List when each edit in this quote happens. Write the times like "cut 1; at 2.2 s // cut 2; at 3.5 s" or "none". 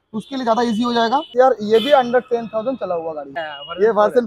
cut 1; at 1.3 s // cut 2; at 3.3 s